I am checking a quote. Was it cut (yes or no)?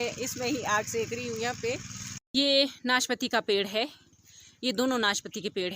yes